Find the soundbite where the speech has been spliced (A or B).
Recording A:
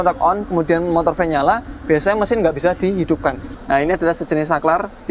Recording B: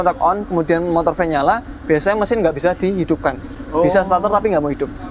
A